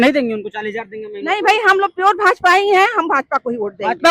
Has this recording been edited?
no; 0 cuts

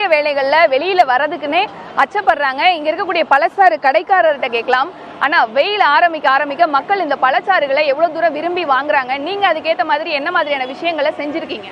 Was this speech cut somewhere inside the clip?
no; 0 cuts

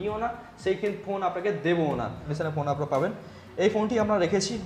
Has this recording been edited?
yes; 1 cut; at 2.3 s

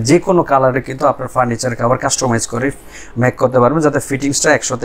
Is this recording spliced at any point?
no; 0 cuts

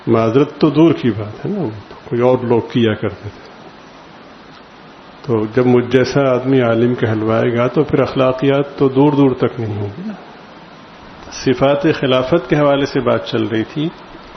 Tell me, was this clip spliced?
yes; 1 cut; at 11.2 s

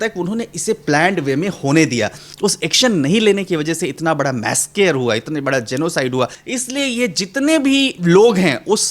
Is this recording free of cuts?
no; 2 cuts; at 2.2 s, 6.4 s

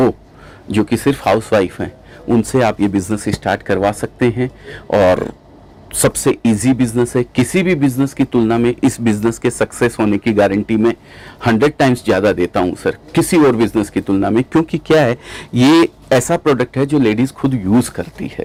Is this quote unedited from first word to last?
yes; 0 cuts

